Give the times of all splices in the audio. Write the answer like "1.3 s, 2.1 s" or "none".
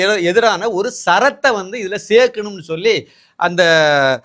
none